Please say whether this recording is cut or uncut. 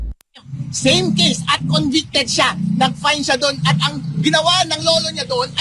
uncut